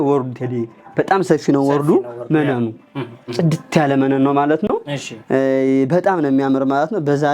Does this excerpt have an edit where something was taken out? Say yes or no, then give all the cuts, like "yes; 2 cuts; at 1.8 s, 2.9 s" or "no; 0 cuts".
no; 0 cuts